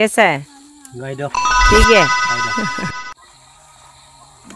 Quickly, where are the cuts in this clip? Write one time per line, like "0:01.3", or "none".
none